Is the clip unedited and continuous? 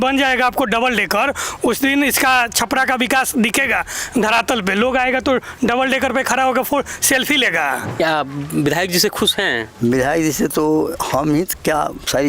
no; 1 cut; at 7.9 s

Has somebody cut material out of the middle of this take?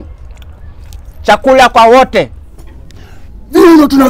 yes; 1 cut; at 2.3 s

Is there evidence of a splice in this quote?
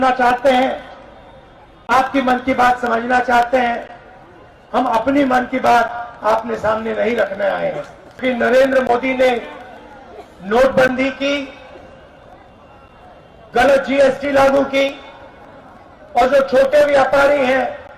yes; 1 cut; at 8.0 s

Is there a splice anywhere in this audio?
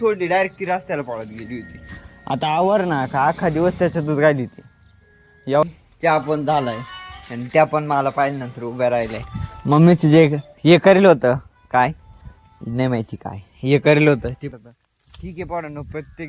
yes; 2 cuts; at 5.6 s, 14.5 s

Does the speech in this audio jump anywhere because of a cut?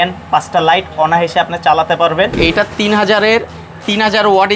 yes; 1 cut; at 2.4 s

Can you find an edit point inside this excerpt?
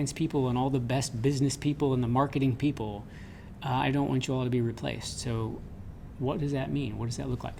no; 0 cuts

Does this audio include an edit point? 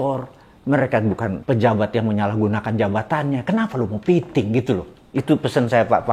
yes; 1 cut; at 1.4 s

